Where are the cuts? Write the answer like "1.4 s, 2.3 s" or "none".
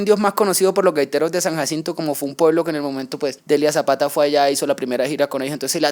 3.3 s